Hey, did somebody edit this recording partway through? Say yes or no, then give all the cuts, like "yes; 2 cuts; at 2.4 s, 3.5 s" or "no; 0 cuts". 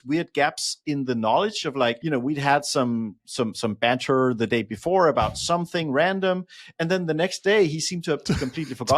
yes; 1 cut; at 2.0 s